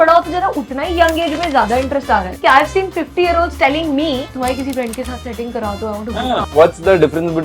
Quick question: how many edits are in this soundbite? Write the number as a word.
three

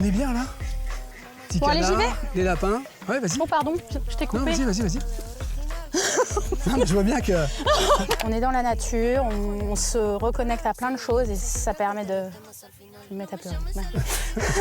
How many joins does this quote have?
one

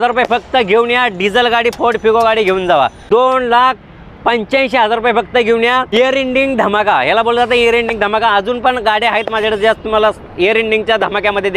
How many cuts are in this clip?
two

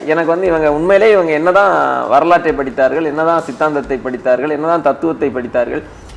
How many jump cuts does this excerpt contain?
zero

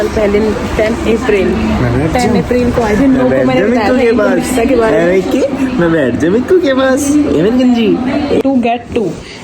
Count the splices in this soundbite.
one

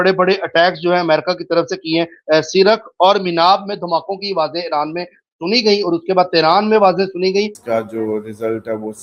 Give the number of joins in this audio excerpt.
one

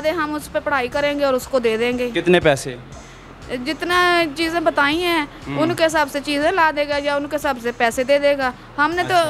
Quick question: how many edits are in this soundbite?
zero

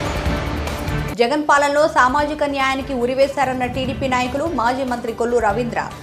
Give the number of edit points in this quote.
zero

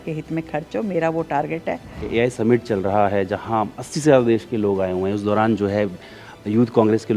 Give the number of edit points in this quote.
one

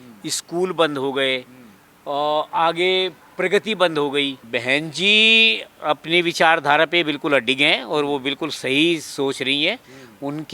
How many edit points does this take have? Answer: one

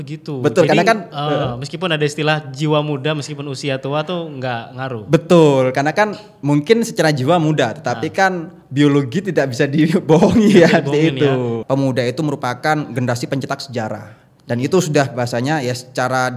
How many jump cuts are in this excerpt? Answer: one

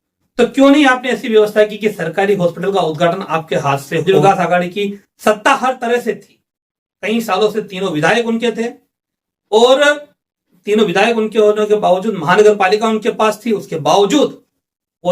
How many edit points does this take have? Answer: one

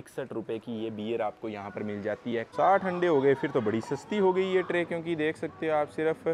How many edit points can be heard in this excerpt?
one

